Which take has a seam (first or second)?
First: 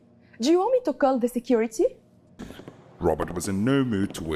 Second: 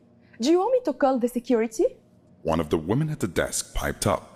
first